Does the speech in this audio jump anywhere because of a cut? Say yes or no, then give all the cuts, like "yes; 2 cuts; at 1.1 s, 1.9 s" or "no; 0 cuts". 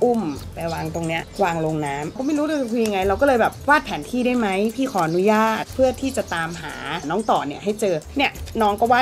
yes; 3 cuts; at 2.2 s, 7.0 s, 8.1 s